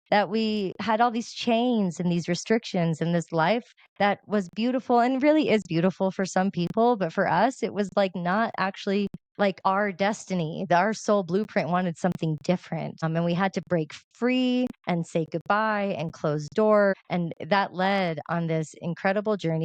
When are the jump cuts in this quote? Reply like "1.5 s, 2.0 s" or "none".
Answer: 3.8 s, 9.4 s, 13.0 s, 14.8 s, 16.9 s